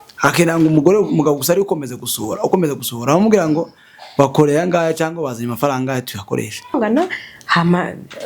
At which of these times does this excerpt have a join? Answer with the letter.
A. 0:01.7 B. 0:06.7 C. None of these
B